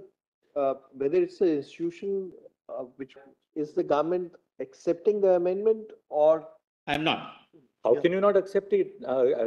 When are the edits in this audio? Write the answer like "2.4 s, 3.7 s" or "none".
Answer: 3.1 s

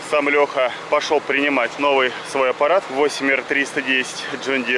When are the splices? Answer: 0.8 s, 1.7 s, 2.9 s

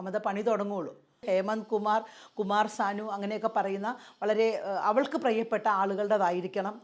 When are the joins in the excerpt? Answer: 1.2 s

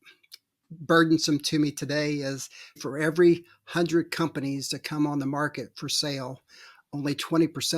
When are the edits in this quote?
2.8 s

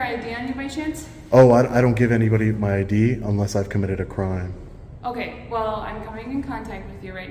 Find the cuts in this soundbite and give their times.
none

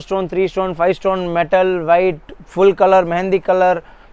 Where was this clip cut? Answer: none

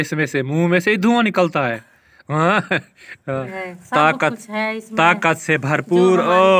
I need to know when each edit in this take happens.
3.5 s

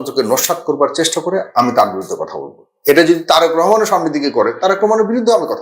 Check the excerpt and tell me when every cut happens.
none

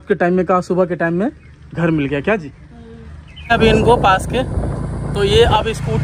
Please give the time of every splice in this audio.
3.5 s

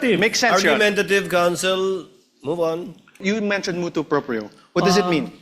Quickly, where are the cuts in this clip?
3.2 s

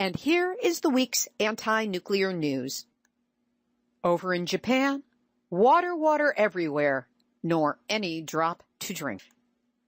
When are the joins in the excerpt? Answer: 2.7 s

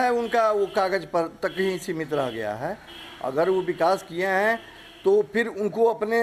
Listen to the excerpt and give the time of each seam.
none

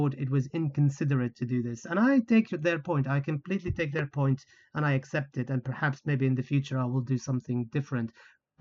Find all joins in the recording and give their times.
none

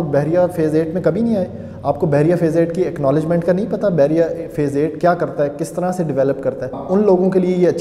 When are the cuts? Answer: 6.8 s

